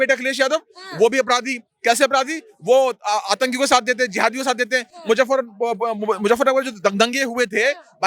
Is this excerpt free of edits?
yes; 0 cuts

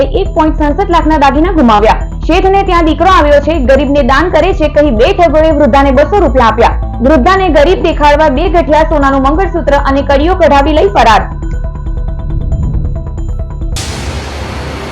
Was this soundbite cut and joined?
yes; 1 cut; at 13.8 s

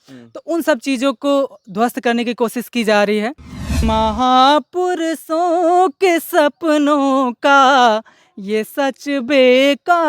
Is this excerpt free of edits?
no; 1 cut; at 3.8 s

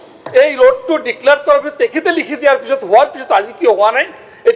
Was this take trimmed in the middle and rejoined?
no; 0 cuts

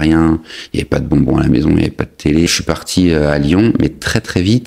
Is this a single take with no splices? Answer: no; 1 cut; at 2.5 s

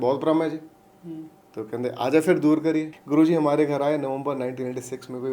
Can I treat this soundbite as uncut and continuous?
no; 1 cut; at 3.0 s

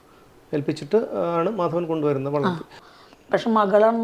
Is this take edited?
yes; 1 cut; at 2.8 s

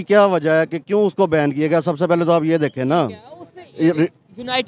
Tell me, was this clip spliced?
no; 0 cuts

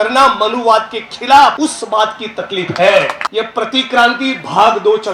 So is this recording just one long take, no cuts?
no; 2 cuts; at 1.6 s, 3.2 s

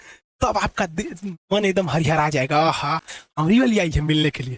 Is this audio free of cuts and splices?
yes; 0 cuts

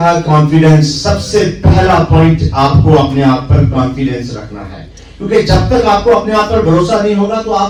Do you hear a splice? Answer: no; 0 cuts

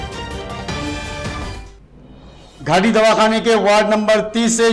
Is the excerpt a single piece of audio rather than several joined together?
no; 1 cut; at 1.3 s

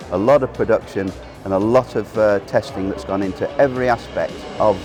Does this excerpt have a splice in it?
no; 0 cuts

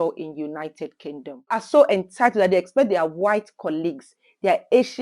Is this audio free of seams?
no; 1 cut; at 1.6 s

